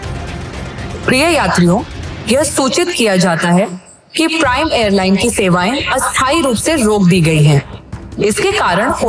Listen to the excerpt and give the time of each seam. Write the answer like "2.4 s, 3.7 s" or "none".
none